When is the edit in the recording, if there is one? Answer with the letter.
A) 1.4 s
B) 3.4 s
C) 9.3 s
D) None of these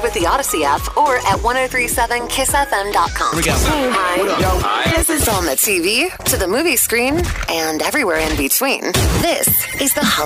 B